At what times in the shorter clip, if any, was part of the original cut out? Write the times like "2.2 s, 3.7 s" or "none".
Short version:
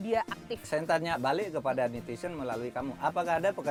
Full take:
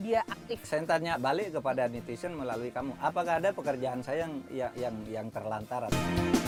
none